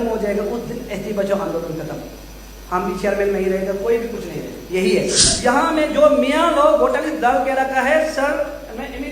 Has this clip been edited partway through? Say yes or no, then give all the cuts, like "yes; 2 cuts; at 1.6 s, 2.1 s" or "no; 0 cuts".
yes; 1 cut; at 5.3 s